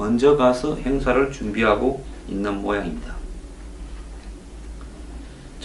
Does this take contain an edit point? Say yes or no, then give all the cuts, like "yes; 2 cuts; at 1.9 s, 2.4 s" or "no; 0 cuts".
yes; 1 cut; at 1.1 s